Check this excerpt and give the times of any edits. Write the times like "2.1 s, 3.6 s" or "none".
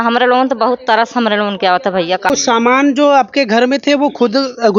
2.3 s